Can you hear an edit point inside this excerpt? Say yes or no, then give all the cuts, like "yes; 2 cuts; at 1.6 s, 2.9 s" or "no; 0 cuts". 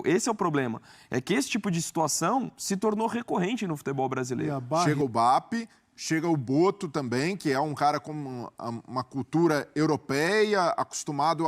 yes; 1 cut; at 4.9 s